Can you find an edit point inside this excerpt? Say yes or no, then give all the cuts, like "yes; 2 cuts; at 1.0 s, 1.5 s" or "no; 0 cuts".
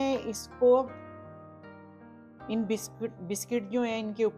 no; 0 cuts